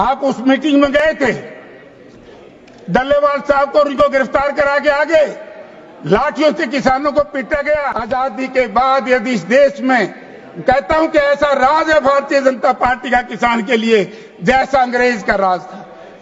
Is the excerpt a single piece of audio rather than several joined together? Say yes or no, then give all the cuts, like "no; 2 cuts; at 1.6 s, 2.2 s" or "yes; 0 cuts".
no; 1 cut; at 7.9 s